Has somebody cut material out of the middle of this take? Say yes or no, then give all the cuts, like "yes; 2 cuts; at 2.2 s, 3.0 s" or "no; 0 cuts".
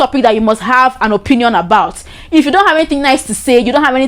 no; 0 cuts